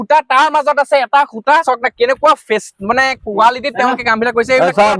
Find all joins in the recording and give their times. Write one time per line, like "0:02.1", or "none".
0:01.6